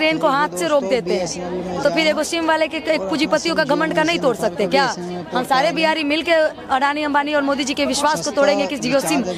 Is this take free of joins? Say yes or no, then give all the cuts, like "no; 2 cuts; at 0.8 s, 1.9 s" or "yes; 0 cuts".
yes; 0 cuts